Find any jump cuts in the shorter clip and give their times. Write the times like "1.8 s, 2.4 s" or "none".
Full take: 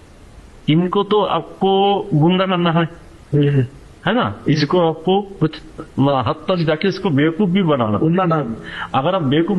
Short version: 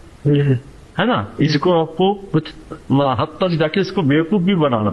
none